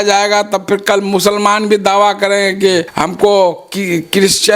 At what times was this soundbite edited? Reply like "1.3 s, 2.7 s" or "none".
2.9 s